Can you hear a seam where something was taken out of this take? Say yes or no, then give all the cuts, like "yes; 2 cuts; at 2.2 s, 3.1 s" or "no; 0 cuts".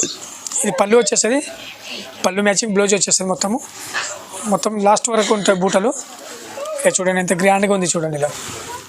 no; 0 cuts